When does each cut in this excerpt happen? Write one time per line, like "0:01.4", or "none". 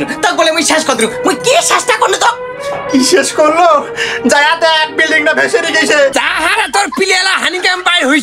0:06.1